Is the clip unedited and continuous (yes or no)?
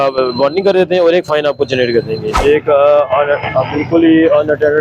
no